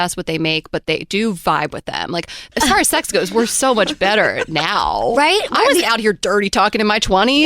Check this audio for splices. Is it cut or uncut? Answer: cut